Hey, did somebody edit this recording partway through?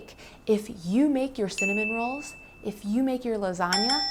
no; 0 cuts

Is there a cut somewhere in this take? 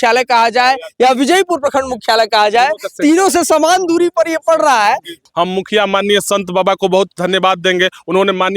yes; 1 cut; at 5.2 s

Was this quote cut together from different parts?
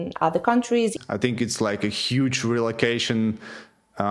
yes; 1 cut; at 1.0 s

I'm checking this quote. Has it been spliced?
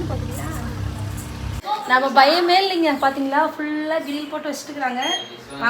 yes; 1 cut; at 1.6 s

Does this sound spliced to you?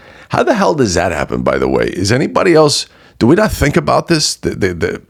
no; 0 cuts

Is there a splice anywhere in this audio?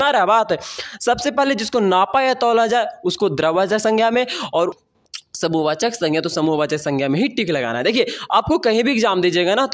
yes; 1 cut; at 4.7 s

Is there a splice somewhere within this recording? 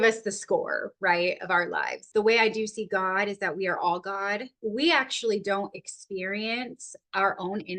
yes; 2 cuts; at 2.1 s, 4.5 s

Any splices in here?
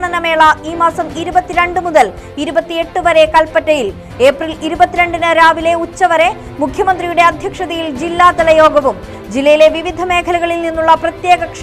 no; 0 cuts

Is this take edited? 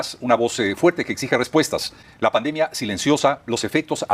yes; 1 cut; at 2.0 s

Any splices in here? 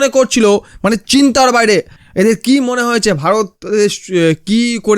yes; 1 cut; at 2.0 s

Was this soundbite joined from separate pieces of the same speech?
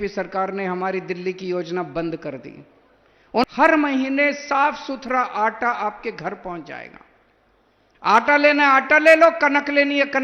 yes; 1 cut; at 3.4 s

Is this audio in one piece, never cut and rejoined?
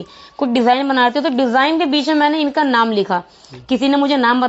yes; 0 cuts

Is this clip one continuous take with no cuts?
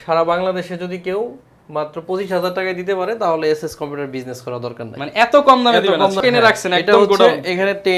no; 1 cut; at 6.2 s

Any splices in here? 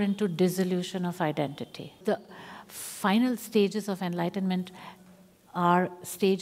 yes; 1 cut; at 2.0 s

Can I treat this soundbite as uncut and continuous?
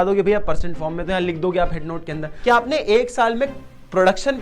no; 1 cut; at 2.3 s

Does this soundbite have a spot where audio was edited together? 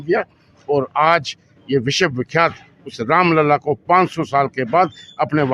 no; 0 cuts

